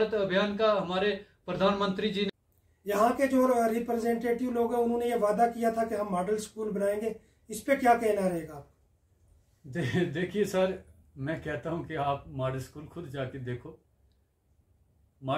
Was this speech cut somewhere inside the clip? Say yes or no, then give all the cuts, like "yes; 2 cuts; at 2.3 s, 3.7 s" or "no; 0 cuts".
yes; 1 cut; at 2.3 s